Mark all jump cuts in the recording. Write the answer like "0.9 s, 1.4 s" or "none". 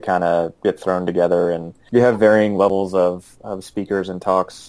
1.7 s